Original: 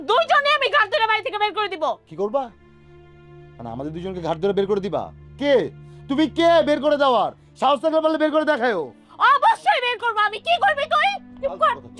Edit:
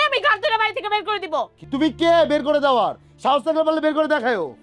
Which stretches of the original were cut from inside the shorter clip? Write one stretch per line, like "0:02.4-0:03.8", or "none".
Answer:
0:02.1-0:05.9